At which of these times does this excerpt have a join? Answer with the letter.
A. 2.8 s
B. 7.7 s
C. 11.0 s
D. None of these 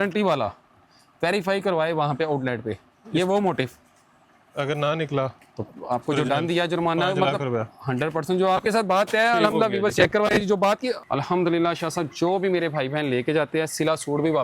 C